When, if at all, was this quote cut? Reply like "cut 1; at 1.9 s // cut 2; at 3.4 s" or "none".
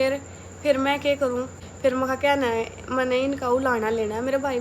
cut 1; at 1.6 s